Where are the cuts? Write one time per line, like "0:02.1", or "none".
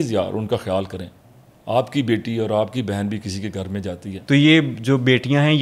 0:04.1